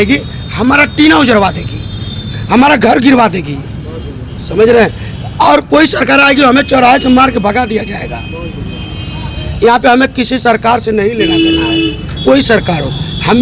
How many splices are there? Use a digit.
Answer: 0